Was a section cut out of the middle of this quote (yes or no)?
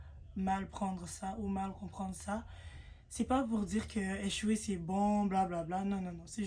no